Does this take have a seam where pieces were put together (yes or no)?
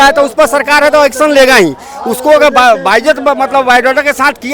no